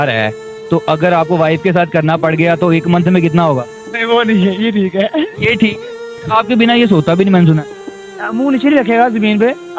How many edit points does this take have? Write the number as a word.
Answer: one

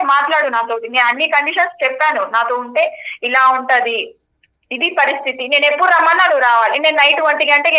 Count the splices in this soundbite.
zero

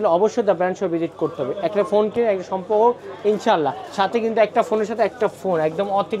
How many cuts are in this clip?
zero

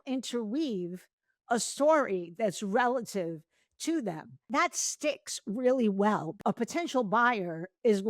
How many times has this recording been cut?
two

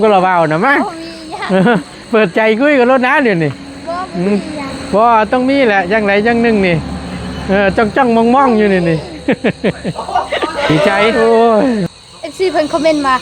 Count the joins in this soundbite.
one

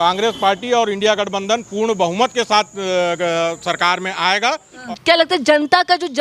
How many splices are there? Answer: one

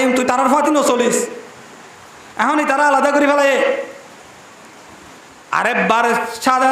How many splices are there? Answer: zero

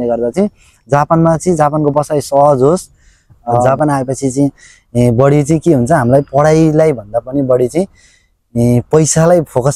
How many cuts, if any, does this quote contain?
one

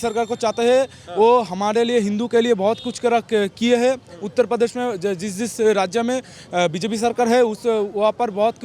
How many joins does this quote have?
zero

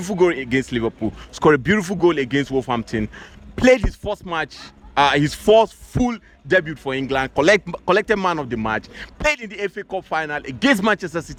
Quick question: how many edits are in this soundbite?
zero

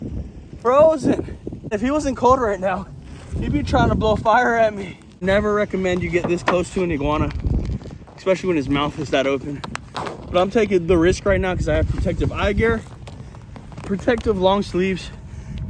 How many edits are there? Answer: two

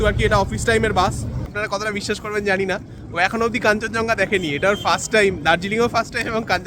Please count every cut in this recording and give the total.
one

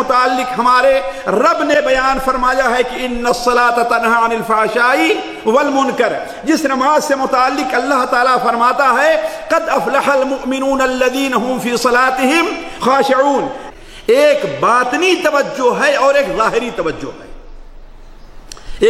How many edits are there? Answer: one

